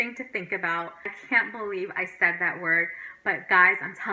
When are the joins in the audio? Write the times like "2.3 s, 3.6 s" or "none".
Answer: 1.2 s

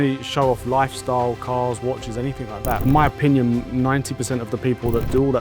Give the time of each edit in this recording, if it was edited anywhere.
2.8 s

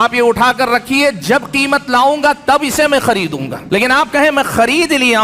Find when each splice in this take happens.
3.5 s

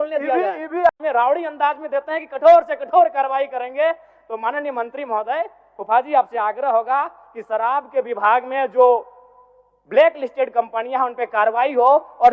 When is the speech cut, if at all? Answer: 0.9 s

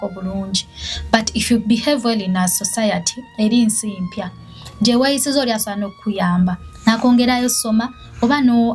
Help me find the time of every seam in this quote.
none

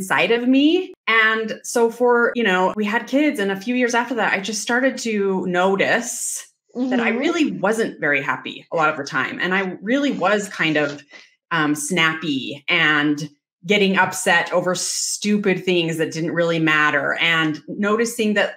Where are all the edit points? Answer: 1.0 s, 2.4 s

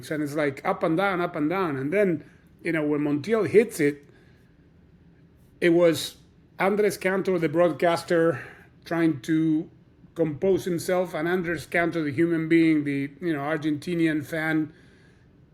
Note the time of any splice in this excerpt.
none

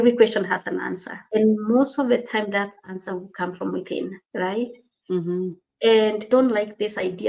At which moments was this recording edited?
1.2 s, 4.2 s, 6.2 s

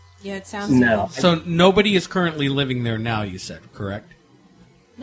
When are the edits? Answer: 2.8 s

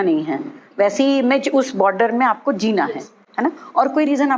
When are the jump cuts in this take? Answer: none

